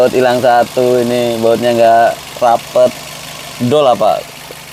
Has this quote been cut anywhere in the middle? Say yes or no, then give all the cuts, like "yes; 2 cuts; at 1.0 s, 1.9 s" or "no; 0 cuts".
no; 0 cuts